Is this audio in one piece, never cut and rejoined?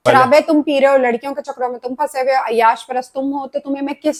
yes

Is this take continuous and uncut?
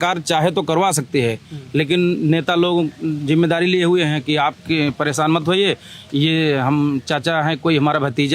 yes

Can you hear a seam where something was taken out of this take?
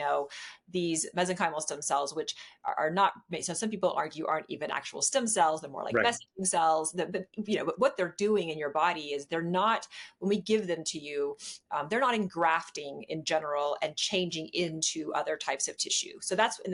no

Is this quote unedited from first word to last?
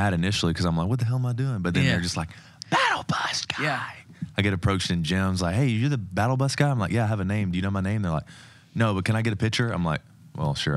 yes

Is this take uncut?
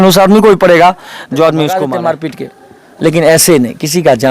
no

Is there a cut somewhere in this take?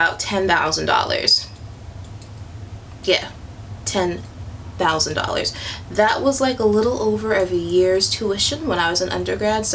no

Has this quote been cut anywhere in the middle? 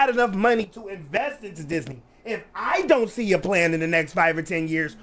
no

